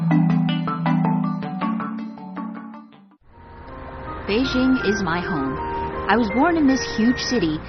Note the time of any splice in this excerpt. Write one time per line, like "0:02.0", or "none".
none